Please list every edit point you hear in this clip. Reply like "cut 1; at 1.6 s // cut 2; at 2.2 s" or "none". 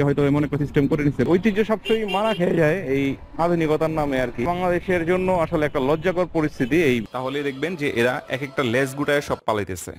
cut 1; at 1.3 s // cut 2; at 4.5 s // cut 3; at 7.1 s